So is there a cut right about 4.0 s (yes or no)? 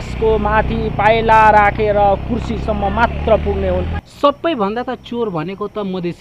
yes